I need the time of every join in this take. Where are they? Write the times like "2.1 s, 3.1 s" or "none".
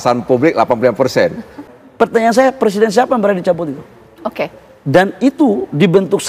1.5 s